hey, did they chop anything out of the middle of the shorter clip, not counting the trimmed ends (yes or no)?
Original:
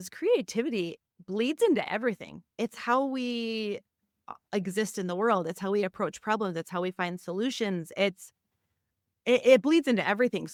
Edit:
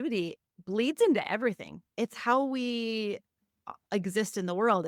no